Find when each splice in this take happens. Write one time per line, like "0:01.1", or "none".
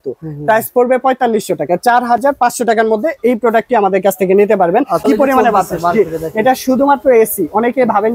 0:05.0

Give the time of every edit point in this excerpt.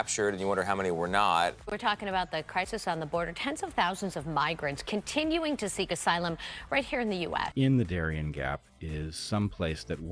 0:01.6
0:07.4

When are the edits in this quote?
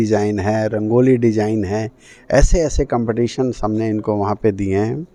none

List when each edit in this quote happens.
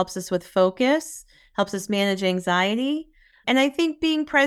none

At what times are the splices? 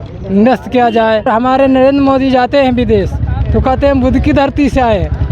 0:01.3

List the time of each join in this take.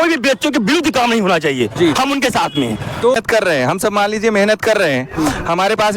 0:03.2

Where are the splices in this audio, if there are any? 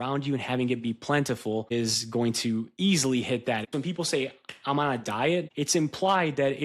0:01.7
0:03.7
0:05.5

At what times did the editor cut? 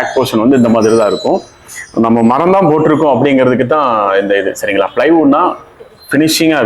none

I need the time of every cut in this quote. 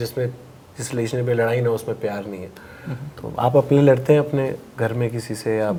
none

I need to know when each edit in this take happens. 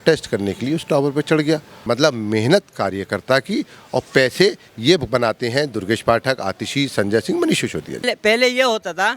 0:01.7
0:08.1

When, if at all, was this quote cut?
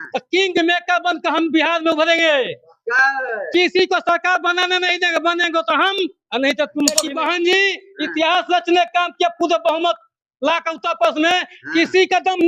0:07.0

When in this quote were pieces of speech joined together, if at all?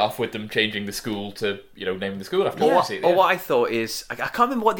none

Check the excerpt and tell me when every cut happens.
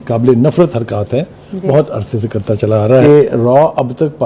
0:03.0

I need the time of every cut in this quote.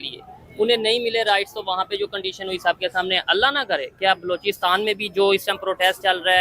none

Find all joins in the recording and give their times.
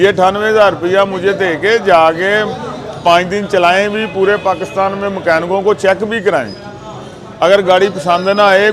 none

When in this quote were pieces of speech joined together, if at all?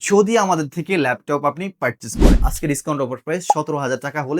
0:02.4

